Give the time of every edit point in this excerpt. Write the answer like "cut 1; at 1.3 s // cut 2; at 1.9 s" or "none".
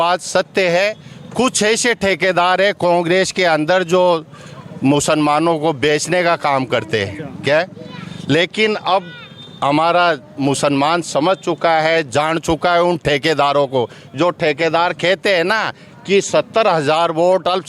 none